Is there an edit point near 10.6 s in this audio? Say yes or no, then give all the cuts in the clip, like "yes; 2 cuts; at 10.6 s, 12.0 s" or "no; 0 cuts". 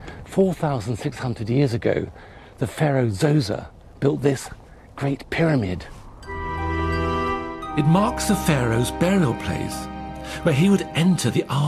no; 1 cut; at 1.1 s